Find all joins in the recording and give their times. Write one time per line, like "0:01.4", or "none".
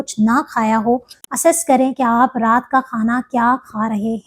0:01.1